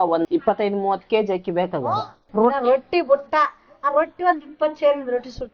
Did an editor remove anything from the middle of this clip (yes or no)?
yes